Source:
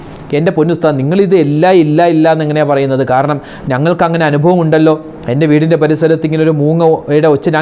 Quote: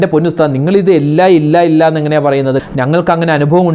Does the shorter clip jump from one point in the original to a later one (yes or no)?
yes